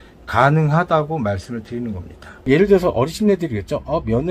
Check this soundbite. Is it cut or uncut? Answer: cut